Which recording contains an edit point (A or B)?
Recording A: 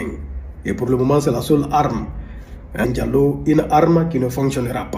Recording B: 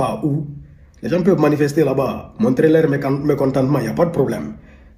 A